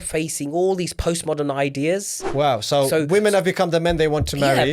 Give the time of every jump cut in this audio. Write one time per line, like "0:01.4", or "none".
0:02.2

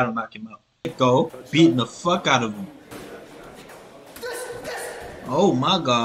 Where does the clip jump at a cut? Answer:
0:00.9

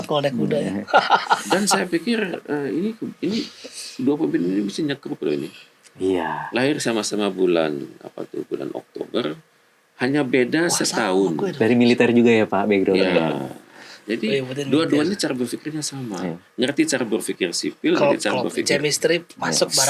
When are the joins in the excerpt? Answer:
none

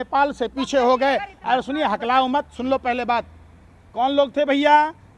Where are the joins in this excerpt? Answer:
none

